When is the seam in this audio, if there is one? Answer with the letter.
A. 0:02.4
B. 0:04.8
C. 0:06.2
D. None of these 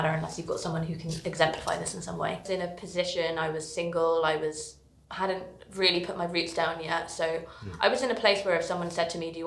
A